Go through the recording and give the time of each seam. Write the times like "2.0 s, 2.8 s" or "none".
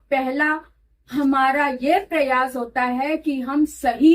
none